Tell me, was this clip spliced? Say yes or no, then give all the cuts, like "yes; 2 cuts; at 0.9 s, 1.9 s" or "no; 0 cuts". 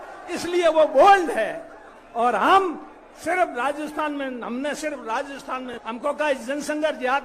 yes; 1 cut; at 5.7 s